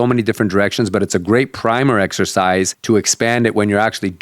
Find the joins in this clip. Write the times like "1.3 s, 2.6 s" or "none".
2.8 s